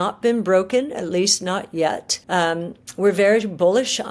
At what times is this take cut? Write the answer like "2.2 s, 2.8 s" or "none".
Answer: 2.1 s

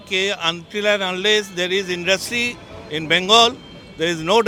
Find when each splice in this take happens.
none

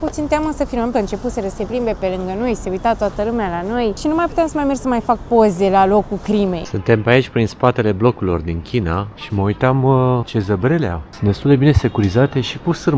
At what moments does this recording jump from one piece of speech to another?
0.9 s, 4.0 s, 6.6 s, 9.2 s, 10.3 s, 11.1 s

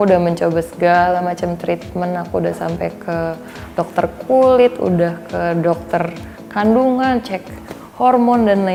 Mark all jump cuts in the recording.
none

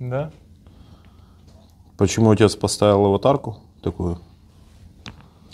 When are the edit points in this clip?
none

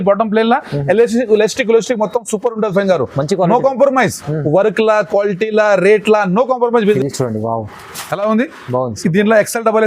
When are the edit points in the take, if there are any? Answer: 7.0 s

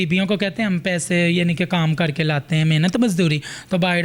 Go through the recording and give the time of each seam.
none

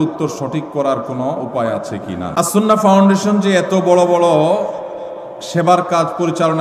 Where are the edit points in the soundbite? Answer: 2.4 s

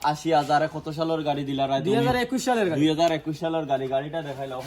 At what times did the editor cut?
none

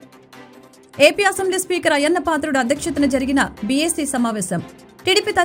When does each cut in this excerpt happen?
none

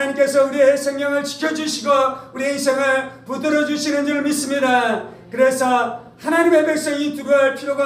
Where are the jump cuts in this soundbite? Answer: none

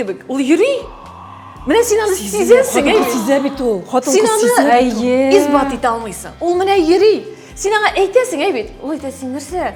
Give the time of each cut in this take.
none

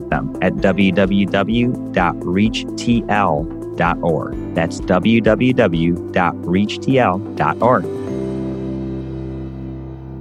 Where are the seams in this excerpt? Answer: 7.8 s

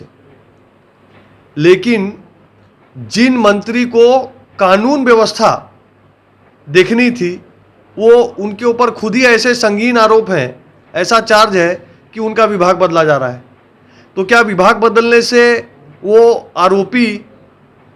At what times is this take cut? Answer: none

